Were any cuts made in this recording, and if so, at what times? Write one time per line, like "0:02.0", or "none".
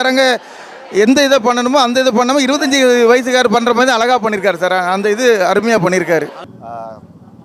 0:06.5